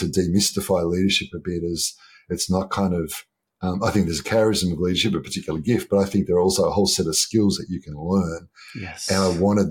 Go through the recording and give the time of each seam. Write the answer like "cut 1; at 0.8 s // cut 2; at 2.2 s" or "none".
none